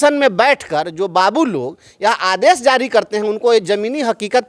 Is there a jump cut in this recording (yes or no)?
no